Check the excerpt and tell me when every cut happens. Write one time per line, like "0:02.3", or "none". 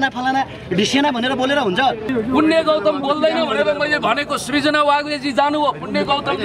0:02.1